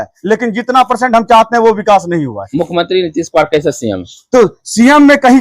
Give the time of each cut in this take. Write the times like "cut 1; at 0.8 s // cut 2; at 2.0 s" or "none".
cut 1; at 2.4 s